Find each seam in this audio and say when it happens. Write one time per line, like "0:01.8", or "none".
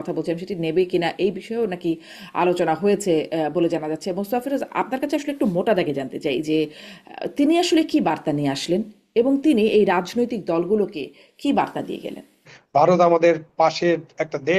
0:12.6